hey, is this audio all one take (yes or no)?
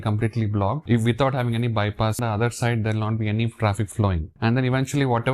no